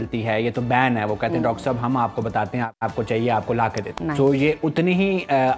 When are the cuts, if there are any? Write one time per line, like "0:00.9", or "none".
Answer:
0:02.7
0:03.8